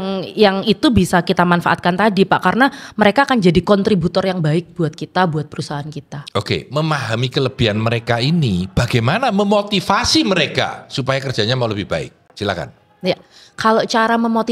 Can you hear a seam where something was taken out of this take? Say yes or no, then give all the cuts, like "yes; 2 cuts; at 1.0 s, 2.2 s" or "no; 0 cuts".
no; 0 cuts